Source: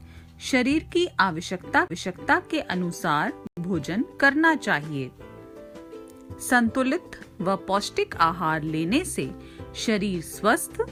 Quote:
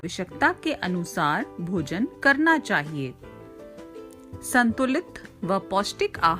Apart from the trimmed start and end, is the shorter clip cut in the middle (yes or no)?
yes